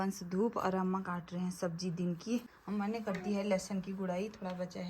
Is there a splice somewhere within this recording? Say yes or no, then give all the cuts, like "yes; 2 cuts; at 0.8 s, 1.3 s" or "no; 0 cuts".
yes; 1 cut; at 2.6 s